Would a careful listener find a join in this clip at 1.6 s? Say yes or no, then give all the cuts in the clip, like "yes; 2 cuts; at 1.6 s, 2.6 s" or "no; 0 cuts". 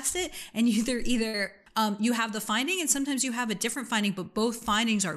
yes; 1 cut; at 1.6 s